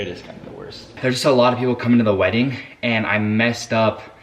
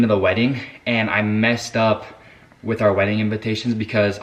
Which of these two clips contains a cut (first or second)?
first